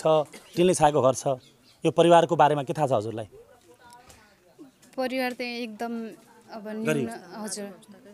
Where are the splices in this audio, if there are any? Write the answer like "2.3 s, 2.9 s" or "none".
none

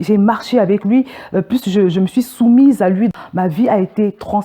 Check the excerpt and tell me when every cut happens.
3.1 s

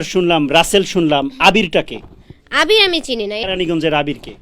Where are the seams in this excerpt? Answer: 3.4 s

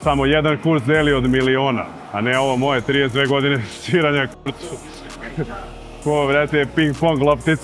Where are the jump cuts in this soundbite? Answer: none

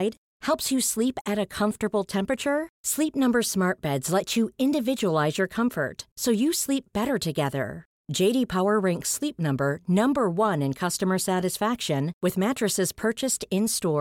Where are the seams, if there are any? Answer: none

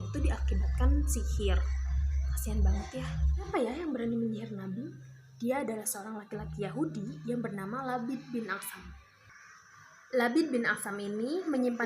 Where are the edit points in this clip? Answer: 3.5 s

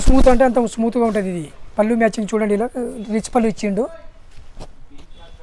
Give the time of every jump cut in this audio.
none

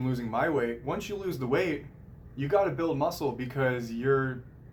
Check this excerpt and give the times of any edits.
none

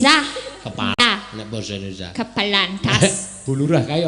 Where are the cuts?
1.0 s

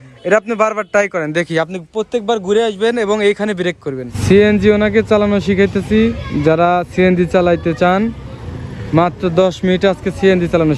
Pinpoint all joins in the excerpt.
4.1 s

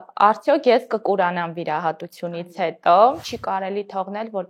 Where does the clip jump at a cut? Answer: 3.3 s

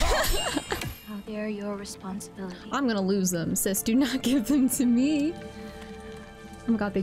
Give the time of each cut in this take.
1.0 s

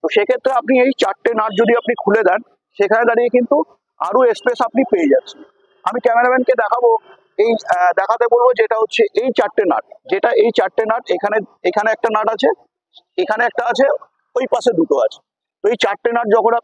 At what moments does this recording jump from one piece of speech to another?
none

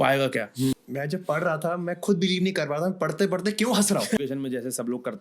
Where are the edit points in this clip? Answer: 0.8 s, 4.2 s

